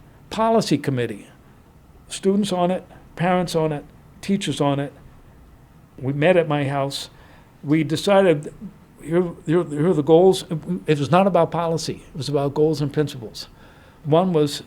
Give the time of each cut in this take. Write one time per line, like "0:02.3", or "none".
0:06.0